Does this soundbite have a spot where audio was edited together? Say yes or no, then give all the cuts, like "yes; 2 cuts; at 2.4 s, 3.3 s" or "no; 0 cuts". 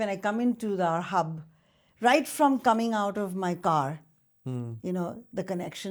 no; 0 cuts